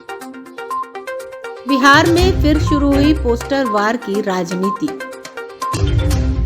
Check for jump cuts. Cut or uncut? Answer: uncut